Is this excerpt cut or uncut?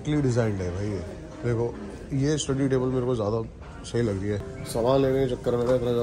cut